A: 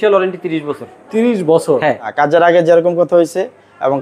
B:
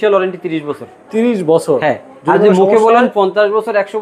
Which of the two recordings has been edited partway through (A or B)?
A